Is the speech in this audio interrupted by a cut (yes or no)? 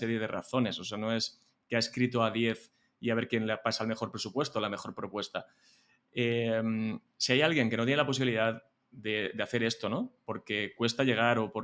no